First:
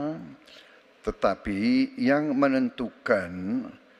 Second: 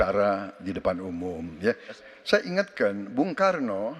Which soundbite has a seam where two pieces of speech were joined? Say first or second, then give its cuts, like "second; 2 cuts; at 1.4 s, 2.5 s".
second; 1 cut; at 2.0 s